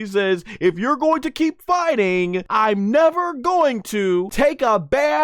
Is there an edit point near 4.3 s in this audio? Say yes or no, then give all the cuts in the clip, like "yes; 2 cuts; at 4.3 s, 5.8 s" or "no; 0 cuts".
yes; 2 cuts; at 2.4 s, 4.3 s